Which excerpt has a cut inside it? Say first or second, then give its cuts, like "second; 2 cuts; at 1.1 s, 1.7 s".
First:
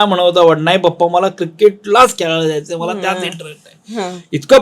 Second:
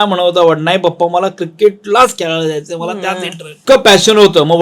second; 1 cut; at 3.6 s